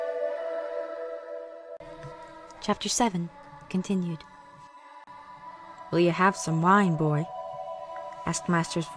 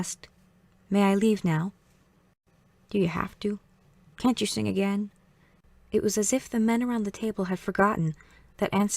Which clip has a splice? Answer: first; 1 cut; at 5.6 s

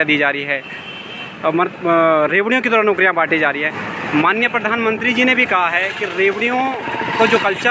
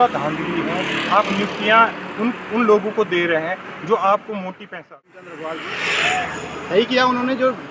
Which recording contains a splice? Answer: second; 1 cut; at 4.8 s

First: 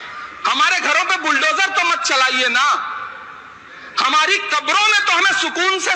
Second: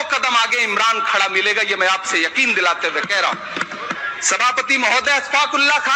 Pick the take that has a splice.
second; 1 cut; at 4.0 s

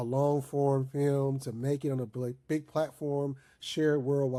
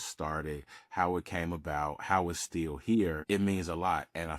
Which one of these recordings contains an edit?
second; 1 cut; at 3.2 s

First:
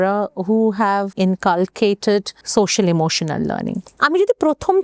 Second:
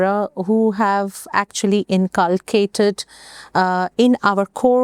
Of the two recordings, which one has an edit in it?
first; 3 cuts; at 1.1 s, 2.4 s, 3.9 s

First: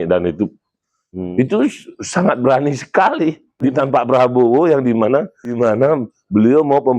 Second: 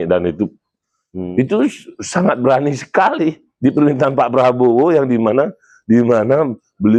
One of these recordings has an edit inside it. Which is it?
first; 2 cuts; at 3.6 s, 5.7 s

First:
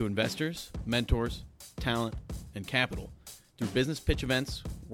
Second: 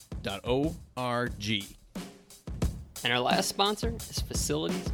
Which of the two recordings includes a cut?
second; 1 cut; at 1.9 s

